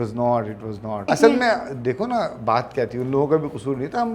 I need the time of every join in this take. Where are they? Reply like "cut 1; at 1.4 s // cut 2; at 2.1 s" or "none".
cut 1; at 1.1 s